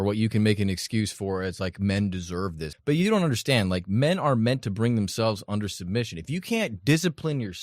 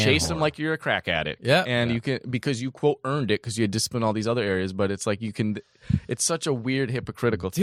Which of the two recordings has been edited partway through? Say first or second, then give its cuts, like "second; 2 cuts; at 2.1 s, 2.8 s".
first; 1 cut; at 2.7 s